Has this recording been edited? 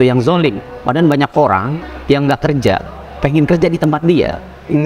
yes; 1 cut; at 1.8 s

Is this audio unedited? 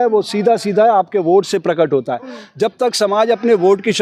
yes; 0 cuts

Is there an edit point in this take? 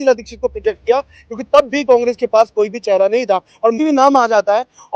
yes; 1 cut; at 3.8 s

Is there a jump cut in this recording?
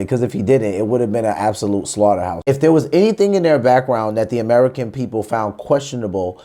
yes; 1 cut; at 2.4 s

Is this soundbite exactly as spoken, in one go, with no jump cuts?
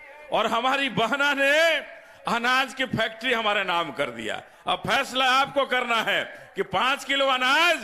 yes; 0 cuts

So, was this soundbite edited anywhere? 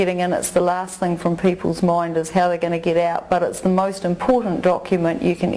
no; 0 cuts

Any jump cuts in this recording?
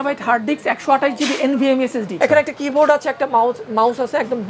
yes; 1 cut; at 2.2 s

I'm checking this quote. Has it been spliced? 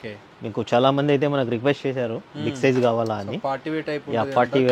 no; 0 cuts

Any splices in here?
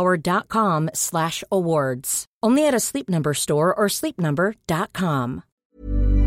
no; 0 cuts

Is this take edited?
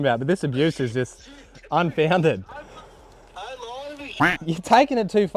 no; 0 cuts

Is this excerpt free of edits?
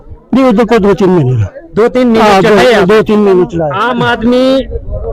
no; 1 cut; at 3.7 s

